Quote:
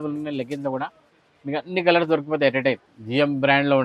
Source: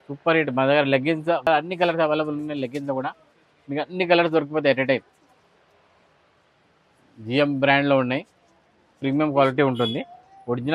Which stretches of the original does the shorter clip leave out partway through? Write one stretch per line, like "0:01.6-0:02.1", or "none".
0:05.2-0:07.1